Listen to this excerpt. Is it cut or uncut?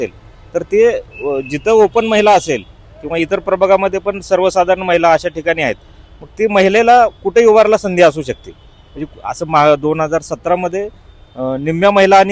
uncut